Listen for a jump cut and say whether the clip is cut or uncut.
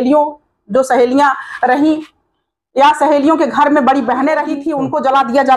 cut